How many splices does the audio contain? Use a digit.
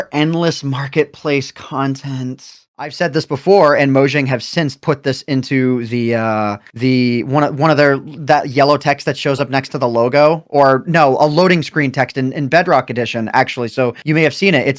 1